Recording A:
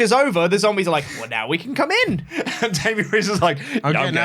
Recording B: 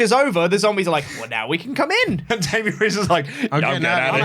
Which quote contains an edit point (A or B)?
B